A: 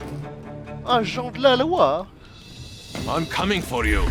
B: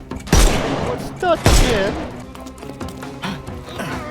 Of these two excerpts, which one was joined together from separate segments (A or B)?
B